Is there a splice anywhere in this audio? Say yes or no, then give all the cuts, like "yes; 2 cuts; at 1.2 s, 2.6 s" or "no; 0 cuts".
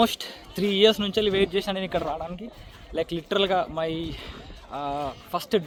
no; 0 cuts